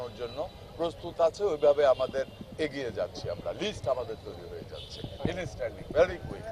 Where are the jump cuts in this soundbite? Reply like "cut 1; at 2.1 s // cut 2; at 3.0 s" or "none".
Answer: none